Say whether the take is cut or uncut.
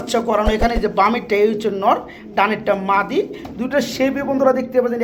uncut